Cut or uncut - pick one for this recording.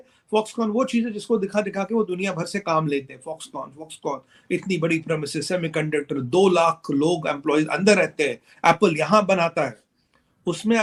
uncut